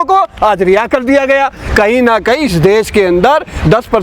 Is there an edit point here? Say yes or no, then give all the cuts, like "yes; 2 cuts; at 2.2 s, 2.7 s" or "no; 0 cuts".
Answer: no; 0 cuts